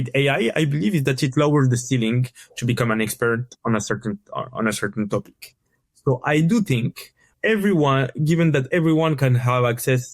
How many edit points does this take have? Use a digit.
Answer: 1